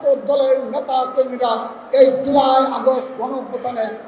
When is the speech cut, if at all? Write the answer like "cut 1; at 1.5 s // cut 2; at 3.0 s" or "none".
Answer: none